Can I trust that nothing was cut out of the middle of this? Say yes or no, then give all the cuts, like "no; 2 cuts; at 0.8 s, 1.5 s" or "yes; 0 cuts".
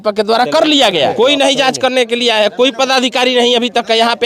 no; 1 cut; at 1.1 s